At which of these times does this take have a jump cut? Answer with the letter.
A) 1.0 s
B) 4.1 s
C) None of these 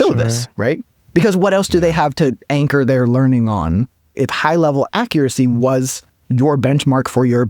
B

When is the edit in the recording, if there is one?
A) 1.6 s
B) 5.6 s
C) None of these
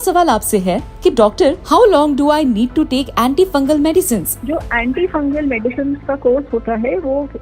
A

